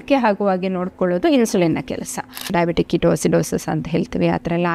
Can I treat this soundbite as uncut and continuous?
no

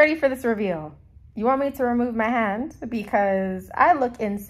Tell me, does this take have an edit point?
yes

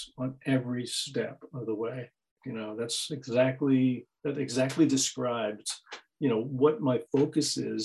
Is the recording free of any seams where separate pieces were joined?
no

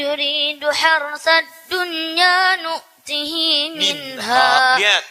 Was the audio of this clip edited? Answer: no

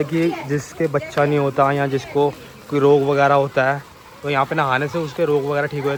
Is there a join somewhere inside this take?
no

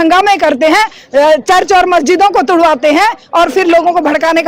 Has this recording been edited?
no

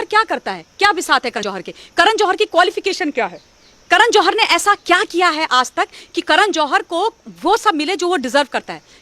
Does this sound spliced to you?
yes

